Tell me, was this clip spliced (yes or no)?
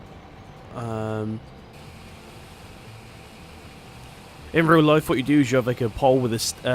yes